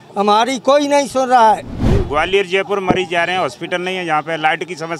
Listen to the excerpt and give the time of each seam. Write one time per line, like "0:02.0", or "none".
0:01.8

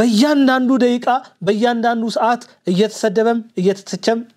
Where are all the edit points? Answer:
none

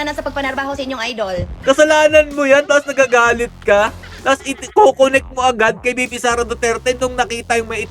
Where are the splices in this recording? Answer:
0:01.6

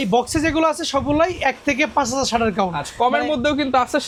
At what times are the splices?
none

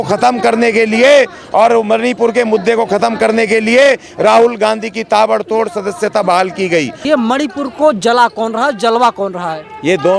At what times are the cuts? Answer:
0:07.0

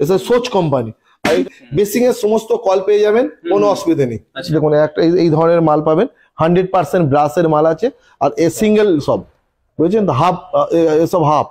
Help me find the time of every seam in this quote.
0:01.4
0:04.4

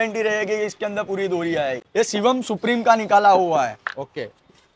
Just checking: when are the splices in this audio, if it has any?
0:01.8

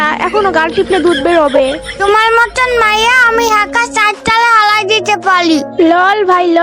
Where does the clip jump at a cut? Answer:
none

